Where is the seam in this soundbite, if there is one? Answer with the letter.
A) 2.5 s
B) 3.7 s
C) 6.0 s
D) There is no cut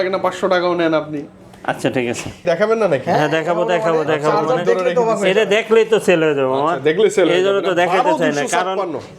A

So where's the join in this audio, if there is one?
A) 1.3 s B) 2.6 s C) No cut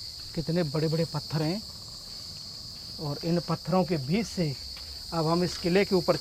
C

